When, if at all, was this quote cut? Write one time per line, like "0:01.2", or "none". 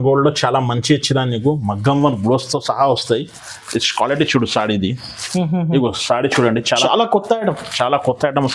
0:06.8